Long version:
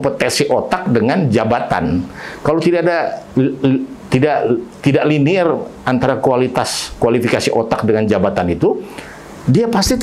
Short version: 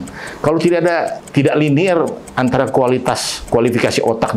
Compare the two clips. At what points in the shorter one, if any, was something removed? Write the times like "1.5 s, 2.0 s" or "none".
1.2 s